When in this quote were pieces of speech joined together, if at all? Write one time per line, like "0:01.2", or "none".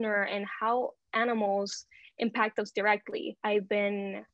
0:03.3